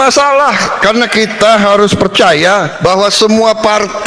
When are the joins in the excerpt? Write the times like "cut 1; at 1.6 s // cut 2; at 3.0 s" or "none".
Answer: cut 1; at 2.7 s

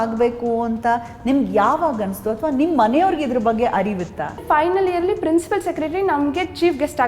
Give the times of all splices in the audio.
cut 1; at 4.4 s

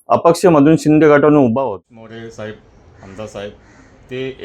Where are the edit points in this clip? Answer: cut 1; at 1.6 s

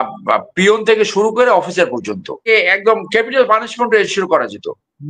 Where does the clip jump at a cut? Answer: cut 1; at 2.4 s

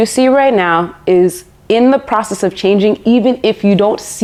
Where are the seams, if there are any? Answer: none

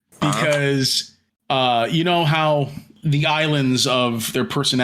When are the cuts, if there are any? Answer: cut 1; at 2.9 s

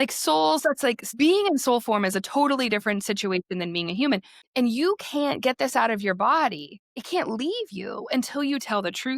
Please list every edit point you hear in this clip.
cut 1; at 1.1 s // cut 2; at 4.4 s // cut 3; at 7.0 s

